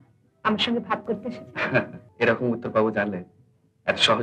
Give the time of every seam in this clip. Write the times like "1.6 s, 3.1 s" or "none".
2.0 s